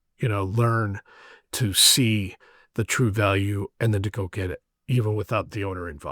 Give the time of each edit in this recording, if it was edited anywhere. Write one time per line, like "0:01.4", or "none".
0:04.7